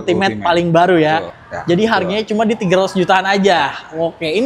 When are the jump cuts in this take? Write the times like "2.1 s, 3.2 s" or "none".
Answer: 1.3 s